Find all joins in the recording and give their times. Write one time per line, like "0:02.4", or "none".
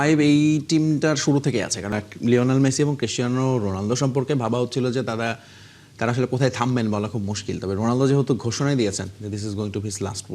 0:01.9